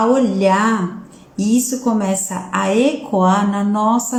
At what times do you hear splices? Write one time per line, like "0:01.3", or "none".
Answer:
none